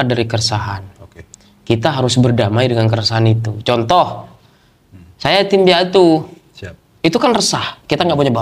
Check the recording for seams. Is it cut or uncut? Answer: uncut